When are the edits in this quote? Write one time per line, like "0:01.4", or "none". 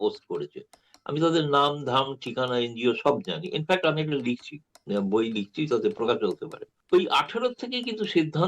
0:06.4